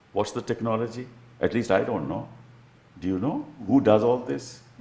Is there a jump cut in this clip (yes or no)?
yes